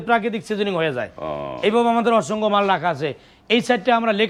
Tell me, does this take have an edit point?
no; 0 cuts

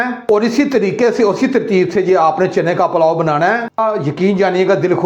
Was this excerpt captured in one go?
no; 1 cut; at 3.8 s

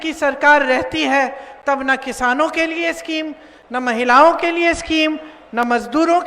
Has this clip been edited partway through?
no; 0 cuts

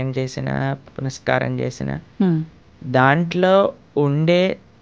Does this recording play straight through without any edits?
yes; 0 cuts

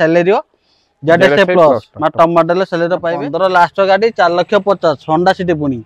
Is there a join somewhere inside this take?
yes; 1 cut; at 3.2 s

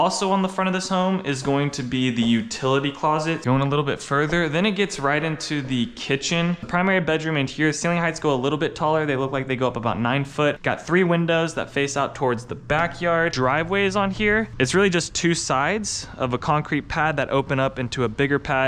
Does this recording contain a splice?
yes; 4 cuts; at 3.4 s, 6.7 s, 10.6 s, 13.3 s

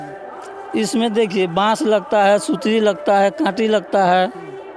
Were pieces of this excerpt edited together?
no; 0 cuts

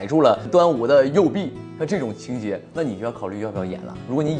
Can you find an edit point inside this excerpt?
no; 0 cuts

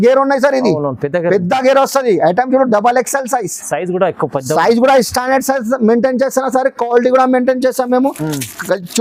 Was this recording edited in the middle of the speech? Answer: no; 0 cuts

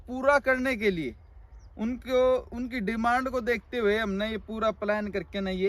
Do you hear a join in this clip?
no; 0 cuts

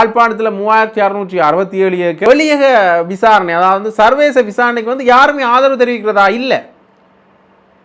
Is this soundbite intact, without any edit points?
no; 1 cut; at 2.2 s

